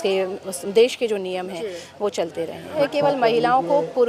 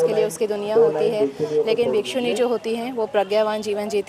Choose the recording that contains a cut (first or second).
first